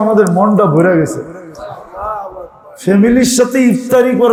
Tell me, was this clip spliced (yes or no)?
no